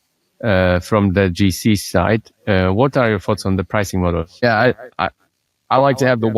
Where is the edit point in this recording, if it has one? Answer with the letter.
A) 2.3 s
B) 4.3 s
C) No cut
B